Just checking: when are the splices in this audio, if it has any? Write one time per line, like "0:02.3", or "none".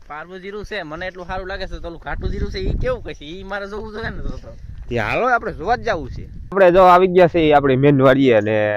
none